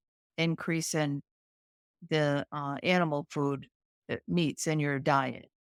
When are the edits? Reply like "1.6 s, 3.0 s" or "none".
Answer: none